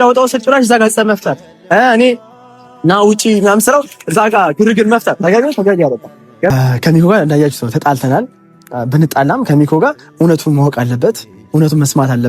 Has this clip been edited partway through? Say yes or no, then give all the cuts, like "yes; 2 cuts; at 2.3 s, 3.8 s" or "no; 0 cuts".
yes; 1 cut; at 6.5 s